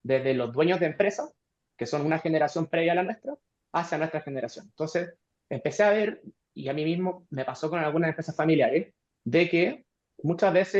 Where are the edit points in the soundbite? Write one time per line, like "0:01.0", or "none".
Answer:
none